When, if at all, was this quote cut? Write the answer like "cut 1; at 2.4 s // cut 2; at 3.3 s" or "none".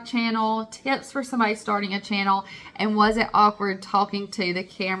none